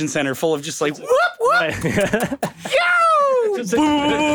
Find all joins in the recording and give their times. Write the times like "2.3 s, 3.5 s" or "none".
none